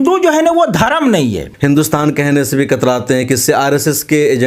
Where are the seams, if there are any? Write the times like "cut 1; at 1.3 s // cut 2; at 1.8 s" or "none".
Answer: cut 1; at 1.5 s